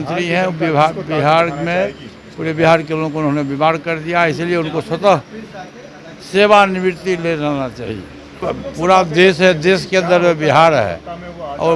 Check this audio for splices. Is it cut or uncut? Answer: cut